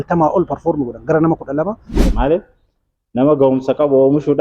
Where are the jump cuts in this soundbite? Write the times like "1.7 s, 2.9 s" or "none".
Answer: 1.9 s